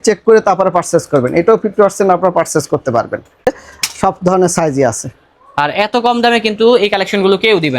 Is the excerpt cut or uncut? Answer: cut